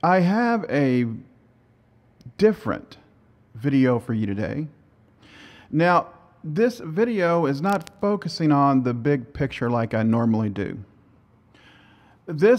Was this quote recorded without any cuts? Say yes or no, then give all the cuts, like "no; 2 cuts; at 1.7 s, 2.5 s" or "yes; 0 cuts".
yes; 0 cuts